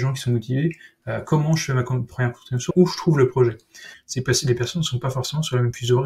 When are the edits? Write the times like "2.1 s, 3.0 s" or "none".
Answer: 2.7 s, 4.0 s